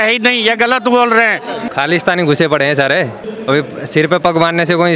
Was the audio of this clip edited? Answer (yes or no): yes